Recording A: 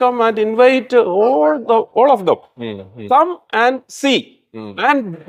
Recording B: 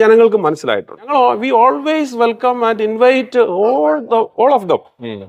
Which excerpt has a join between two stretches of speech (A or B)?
B